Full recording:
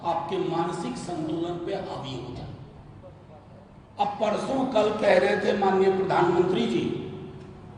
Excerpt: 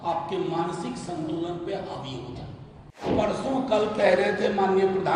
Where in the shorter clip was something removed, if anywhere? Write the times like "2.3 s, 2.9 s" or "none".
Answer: 3.1 s